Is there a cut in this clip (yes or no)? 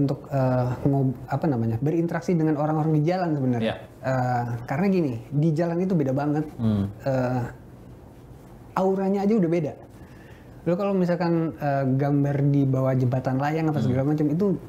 no